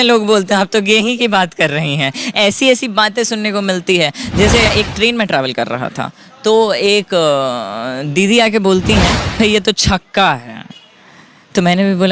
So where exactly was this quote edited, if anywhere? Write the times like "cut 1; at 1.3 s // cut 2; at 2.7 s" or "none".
cut 1; at 4.7 s // cut 2; at 9.4 s